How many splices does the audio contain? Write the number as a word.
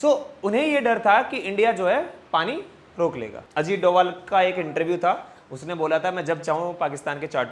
one